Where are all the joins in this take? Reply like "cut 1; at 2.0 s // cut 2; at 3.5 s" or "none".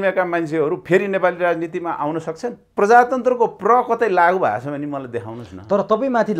cut 1; at 2.7 s